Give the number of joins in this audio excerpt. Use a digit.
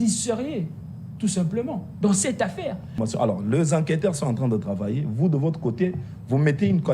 1